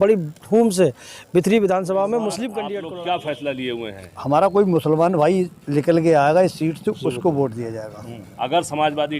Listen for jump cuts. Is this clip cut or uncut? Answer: cut